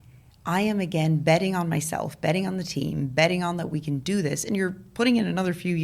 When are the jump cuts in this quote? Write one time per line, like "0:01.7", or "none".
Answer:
none